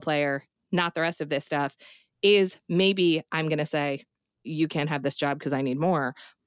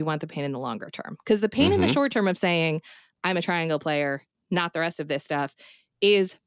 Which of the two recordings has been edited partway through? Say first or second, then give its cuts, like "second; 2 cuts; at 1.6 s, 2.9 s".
first; 1 cut; at 4.3 s